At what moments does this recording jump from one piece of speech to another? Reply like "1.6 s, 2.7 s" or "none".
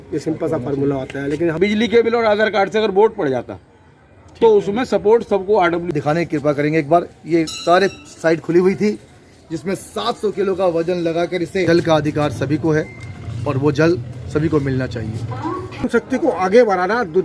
1.6 s, 5.8 s, 11.6 s, 15.8 s